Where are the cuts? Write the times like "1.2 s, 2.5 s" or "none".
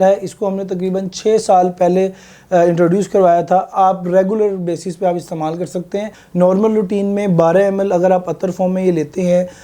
3.7 s, 6.2 s